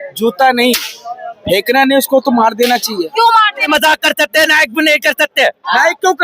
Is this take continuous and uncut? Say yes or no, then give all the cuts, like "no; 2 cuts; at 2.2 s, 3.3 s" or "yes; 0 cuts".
no; 1 cut; at 3.7 s